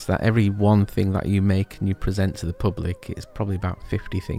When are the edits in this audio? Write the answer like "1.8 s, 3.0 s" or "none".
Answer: none